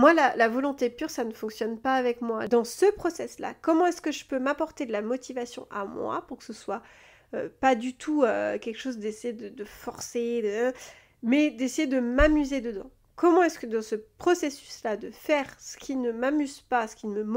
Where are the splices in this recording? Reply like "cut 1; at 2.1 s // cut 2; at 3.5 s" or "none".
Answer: cut 1; at 2.5 s